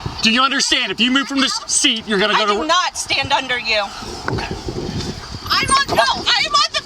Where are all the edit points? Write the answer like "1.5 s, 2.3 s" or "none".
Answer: 5.3 s